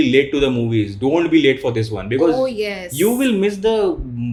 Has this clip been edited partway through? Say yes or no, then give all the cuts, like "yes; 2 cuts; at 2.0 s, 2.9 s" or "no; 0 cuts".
no; 0 cuts